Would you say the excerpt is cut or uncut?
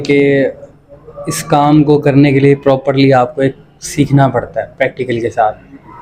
uncut